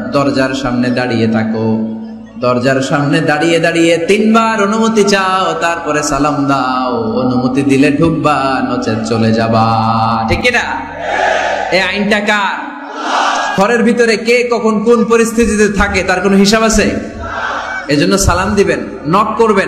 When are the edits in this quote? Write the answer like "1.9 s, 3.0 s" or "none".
13.5 s